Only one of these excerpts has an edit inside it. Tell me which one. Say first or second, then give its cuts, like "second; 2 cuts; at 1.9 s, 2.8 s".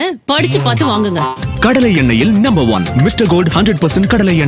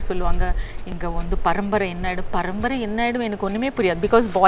second; 1 cut; at 0.9 s